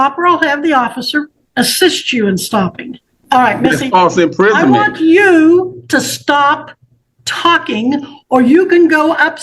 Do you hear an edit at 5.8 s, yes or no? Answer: no